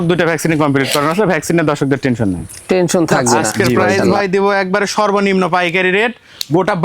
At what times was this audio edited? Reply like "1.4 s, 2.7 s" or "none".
4.0 s